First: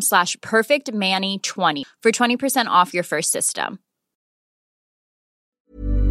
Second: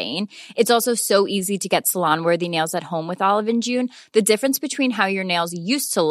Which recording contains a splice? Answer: first; 1 cut; at 1.8 s

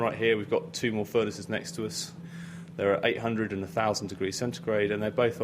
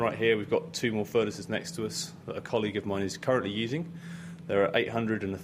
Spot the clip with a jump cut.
first; 1 cut; at 2.2 s

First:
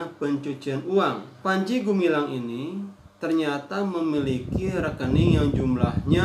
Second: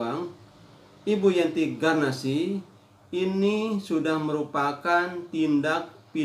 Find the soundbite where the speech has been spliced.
first; 1 cut; at 1.3 s

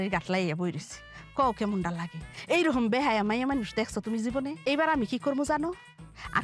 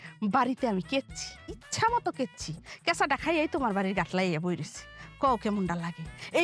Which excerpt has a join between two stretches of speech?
first; 1 cut; at 4.6 s

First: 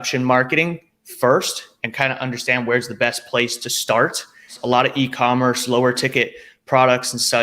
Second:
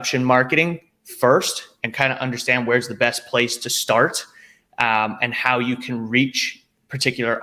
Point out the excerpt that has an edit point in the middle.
first; 1 cut; at 4.5 s

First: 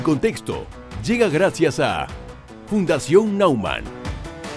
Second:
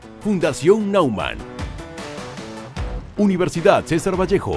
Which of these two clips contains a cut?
second; 1 cut; at 3.1 s

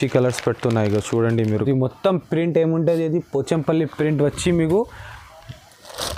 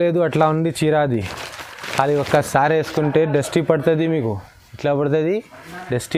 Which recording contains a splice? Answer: first; 1 cut; at 1.6 s

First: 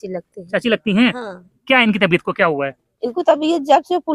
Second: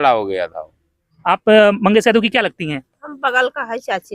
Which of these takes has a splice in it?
second; 1 cut; at 1.1 s

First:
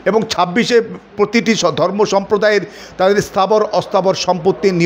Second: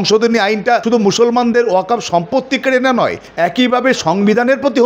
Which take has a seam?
second; 2 cuts; at 0.8 s, 3.2 s

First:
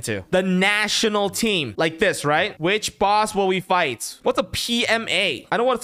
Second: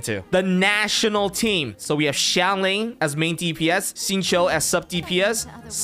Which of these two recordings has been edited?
first; 3 cuts; at 1.7 s, 2.5 s, 4.1 s

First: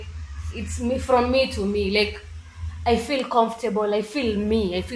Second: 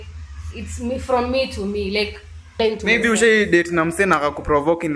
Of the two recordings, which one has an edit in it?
second; 1 cut; at 2.6 s

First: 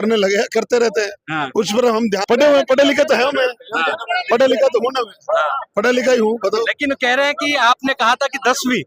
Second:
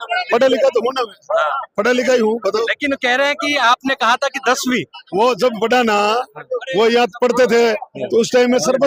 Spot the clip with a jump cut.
first; 1 cut; at 2.2 s

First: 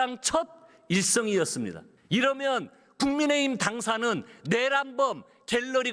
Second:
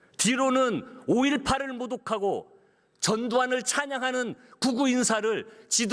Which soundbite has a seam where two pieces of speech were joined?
first; 1 cut; at 1.9 s

